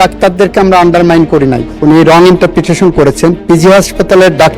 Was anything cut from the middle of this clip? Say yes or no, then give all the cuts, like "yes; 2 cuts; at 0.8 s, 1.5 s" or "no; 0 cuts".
yes; 1 cut; at 1.7 s